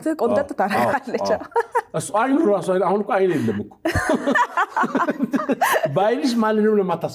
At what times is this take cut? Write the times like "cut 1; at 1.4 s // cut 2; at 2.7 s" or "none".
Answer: none